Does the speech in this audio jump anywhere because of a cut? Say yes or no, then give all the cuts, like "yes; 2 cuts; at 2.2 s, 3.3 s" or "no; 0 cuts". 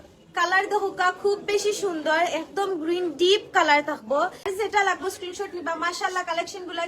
yes; 1 cut; at 4.5 s